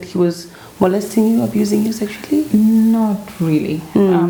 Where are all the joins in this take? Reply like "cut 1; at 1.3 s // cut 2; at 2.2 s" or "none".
none